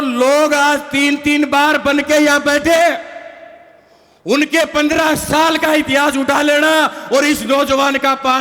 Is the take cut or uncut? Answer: uncut